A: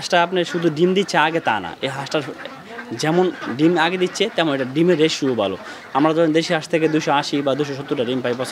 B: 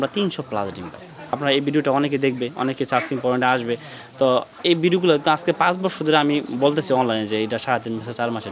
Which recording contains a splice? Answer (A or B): B